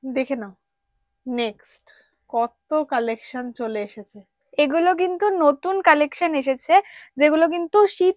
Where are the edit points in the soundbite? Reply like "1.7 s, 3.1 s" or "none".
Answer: none